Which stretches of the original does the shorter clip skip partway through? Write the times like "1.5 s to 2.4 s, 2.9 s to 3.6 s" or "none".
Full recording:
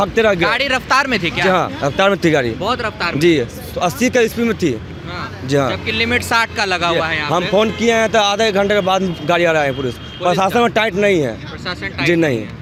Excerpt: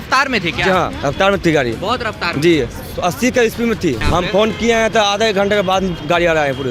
4.8 s to 7.2 s